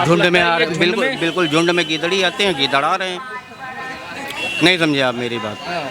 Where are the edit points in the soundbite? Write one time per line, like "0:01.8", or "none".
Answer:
none